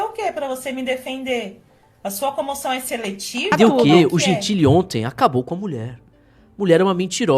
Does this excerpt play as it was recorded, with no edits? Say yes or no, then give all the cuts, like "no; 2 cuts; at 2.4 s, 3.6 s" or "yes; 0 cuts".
no; 1 cut; at 3.6 s